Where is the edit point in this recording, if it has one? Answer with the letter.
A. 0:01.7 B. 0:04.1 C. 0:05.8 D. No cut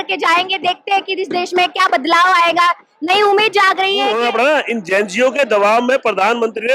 B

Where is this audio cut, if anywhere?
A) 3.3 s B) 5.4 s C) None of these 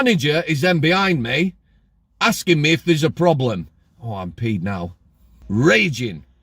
B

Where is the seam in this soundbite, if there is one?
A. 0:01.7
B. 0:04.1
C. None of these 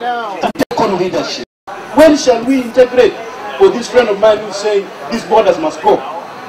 A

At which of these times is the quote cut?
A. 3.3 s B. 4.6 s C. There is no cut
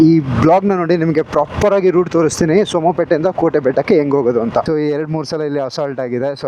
B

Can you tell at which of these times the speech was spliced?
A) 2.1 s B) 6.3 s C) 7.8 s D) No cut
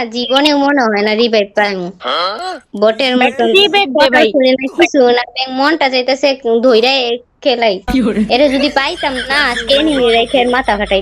C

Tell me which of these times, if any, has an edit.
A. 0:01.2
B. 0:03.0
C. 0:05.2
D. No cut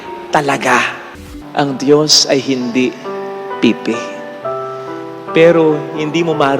A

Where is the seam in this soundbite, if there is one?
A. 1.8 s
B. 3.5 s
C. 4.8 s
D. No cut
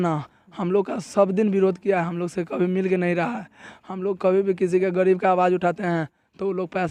D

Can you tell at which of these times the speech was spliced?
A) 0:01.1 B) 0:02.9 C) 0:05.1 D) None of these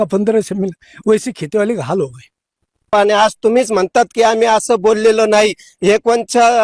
B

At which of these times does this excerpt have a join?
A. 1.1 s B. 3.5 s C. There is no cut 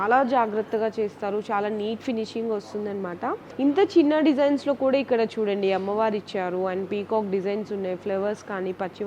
B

